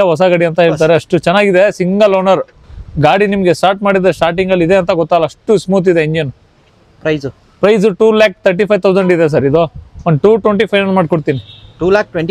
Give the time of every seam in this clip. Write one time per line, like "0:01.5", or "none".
none